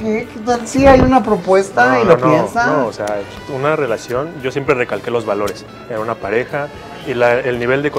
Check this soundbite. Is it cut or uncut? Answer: uncut